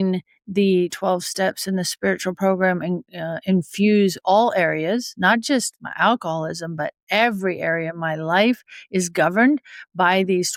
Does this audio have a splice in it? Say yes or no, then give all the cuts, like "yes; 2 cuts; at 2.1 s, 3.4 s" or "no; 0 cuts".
no; 0 cuts